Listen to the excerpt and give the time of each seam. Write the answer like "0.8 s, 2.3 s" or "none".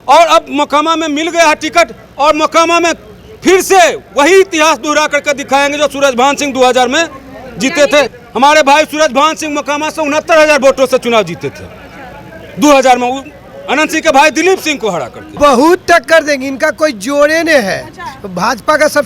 8.2 s, 15.3 s

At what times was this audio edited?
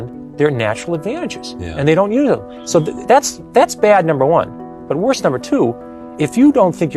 none

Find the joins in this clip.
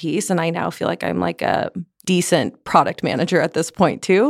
1.9 s

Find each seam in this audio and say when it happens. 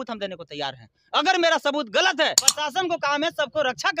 2.5 s

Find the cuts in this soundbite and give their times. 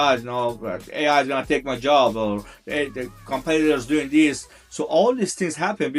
none

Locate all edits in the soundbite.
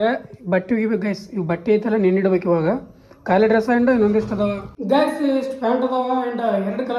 4.7 s

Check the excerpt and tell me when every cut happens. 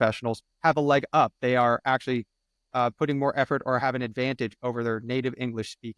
none

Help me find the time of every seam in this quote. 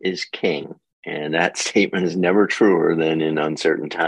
none

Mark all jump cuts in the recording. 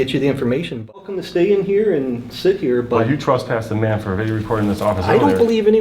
1.0 s

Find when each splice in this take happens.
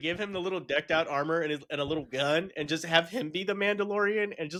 none

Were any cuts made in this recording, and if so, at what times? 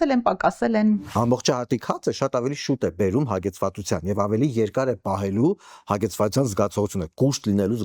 1.0 s

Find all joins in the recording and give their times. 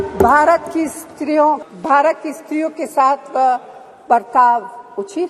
1.7 s

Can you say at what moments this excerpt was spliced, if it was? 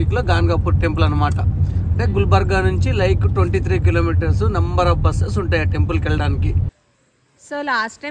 7.0 s

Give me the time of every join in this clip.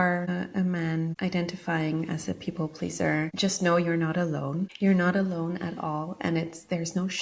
none

